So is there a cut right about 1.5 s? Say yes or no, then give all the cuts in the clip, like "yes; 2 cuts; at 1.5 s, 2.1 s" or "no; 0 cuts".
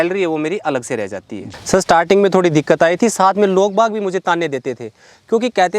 yes; 1 cut; at 1.5 s